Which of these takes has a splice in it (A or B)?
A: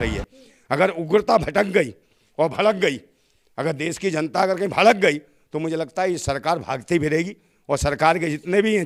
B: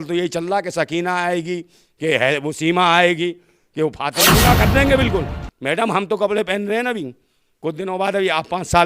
B